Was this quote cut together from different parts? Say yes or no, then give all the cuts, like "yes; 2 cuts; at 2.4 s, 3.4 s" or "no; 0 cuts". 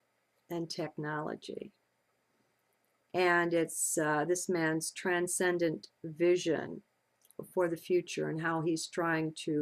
yes; 1 cut; at 3.8 s